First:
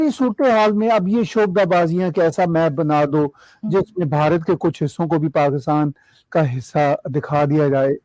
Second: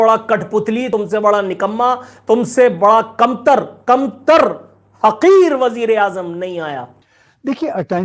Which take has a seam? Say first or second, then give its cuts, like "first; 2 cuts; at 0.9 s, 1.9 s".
second; 2 cuts; at 0.9 s, 6.9 s